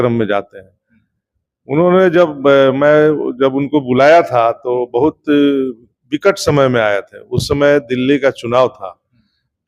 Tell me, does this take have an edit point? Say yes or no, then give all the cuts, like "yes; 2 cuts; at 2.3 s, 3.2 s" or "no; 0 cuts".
no; 0 cuts